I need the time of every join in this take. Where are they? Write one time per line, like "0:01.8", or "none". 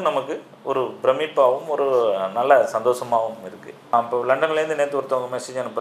0:03.9